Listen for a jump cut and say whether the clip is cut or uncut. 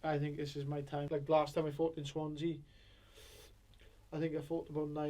cut